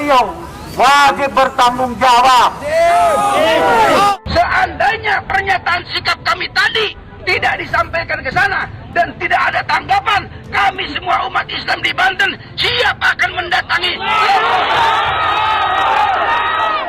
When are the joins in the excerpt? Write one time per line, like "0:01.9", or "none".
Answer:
0:04.1

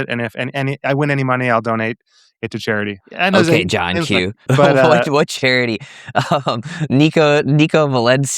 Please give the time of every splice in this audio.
0:03.0
0:04.4

